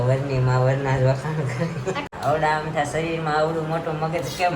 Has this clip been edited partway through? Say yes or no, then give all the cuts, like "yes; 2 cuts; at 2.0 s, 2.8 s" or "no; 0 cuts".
yes; 1 cut; at 2.1 s